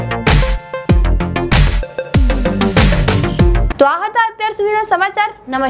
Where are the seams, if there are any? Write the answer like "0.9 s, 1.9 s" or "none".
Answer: none